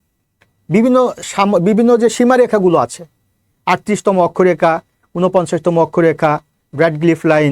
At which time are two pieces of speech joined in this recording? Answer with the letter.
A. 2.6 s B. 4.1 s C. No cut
C